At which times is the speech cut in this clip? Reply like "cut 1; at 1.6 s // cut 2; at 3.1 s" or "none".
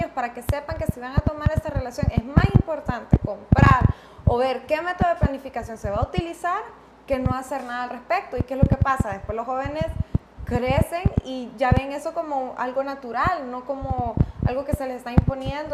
none